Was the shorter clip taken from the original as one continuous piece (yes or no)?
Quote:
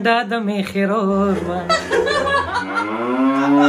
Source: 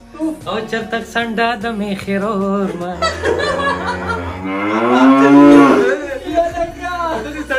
no